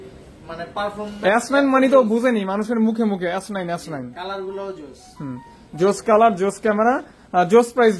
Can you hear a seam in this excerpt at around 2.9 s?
no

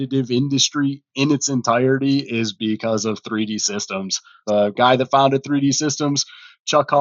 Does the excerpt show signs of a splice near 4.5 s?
yes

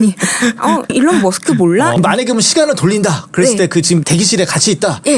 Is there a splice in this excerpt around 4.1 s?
yes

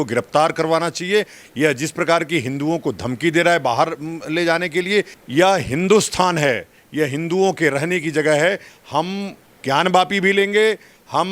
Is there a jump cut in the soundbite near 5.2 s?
yes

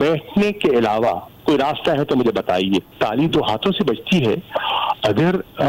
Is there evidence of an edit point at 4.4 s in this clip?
no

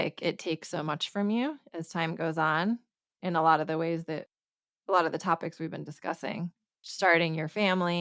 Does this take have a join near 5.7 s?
no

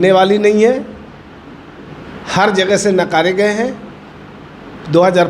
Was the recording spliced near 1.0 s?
no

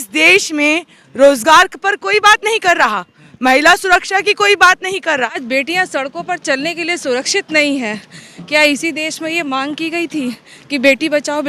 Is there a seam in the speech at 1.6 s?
no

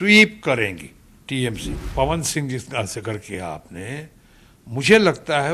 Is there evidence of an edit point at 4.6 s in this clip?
no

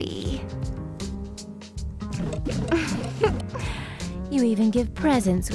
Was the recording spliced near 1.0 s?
no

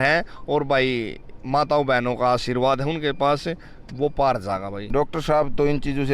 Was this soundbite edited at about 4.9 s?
yes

